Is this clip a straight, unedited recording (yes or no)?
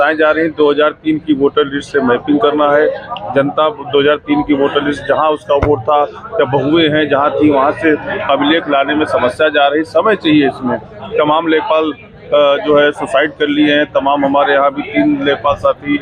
yes